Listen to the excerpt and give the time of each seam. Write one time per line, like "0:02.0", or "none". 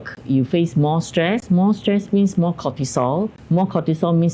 0:03.4